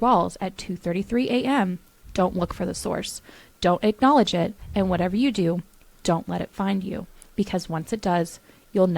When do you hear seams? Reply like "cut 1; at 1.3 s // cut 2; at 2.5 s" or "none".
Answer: none